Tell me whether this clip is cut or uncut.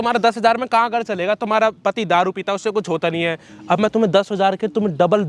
uncut